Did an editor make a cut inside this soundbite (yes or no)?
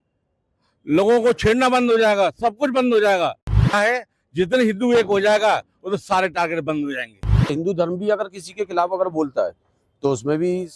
yes